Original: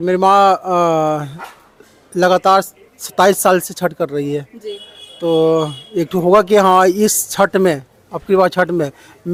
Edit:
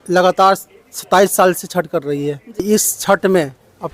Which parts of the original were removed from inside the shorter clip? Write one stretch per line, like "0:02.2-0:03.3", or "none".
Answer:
0:04.7-0:06.9